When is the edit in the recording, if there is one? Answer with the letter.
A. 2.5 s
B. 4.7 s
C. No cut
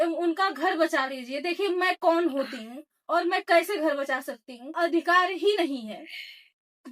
B